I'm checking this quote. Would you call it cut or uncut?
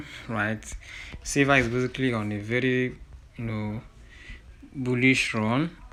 uncut